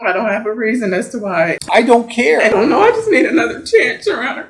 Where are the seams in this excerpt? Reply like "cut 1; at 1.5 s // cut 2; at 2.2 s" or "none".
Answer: cut 1; at 1.6 s // cut 2; at 2.5 s